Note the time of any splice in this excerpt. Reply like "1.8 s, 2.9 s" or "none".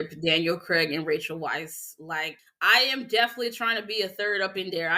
2.4 s